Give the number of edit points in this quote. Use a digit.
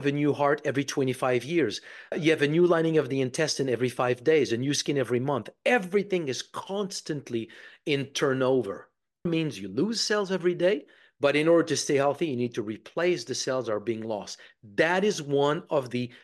2